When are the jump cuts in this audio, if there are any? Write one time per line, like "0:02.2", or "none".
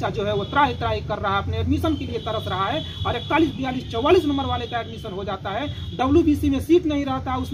none